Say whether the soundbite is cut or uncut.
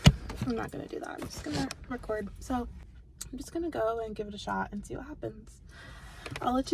cut